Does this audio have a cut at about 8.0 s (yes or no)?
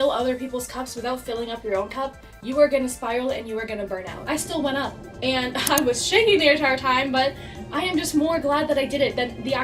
no